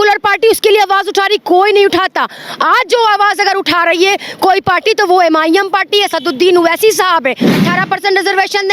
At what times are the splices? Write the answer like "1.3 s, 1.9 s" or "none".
7.5 s